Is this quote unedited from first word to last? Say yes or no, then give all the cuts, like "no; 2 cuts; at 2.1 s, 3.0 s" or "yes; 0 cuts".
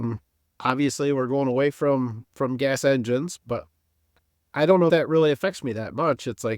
no; 1 cut; at 4.9 s